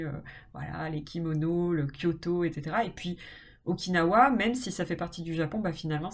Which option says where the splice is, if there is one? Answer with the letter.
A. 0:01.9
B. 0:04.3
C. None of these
C